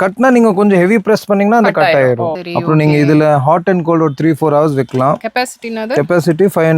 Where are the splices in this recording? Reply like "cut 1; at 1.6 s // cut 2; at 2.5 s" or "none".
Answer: cut 1; at 2.4 s